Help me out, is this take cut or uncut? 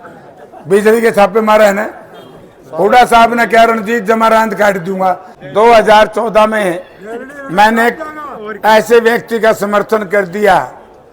cut